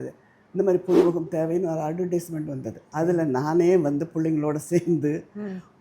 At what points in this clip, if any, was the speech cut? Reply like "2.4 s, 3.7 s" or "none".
2.8 s